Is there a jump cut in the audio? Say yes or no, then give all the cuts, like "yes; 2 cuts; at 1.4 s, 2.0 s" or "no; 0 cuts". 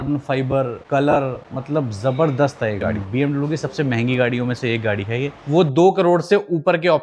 yes; 2 cuts; at 2.9 s, 5.4 s